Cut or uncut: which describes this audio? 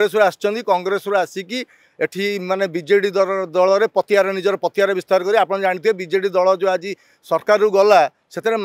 uncut